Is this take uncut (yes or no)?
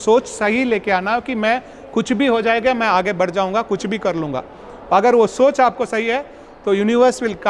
yes